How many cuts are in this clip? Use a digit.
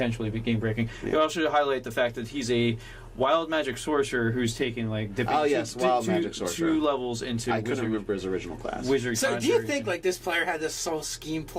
1